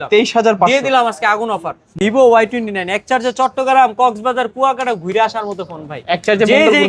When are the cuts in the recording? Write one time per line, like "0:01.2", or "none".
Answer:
0:02.0